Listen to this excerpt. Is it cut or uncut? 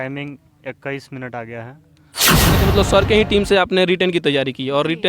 cut